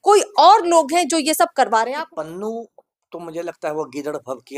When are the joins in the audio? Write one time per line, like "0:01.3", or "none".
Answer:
0:01.9